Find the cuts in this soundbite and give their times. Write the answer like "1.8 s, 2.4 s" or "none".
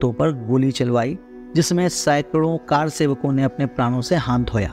none